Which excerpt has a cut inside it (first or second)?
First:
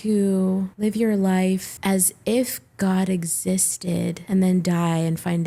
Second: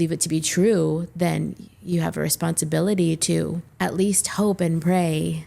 second